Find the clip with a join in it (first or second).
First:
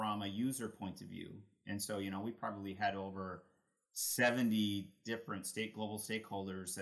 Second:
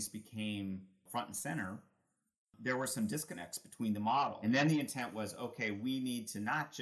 second